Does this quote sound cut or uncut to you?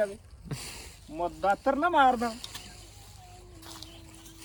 uncut